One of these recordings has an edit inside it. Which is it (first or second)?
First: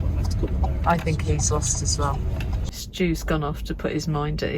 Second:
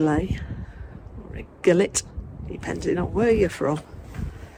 first